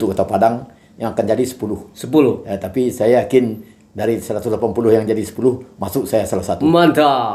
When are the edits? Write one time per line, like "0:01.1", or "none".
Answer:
none